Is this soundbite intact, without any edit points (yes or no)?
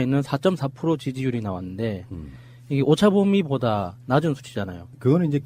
yes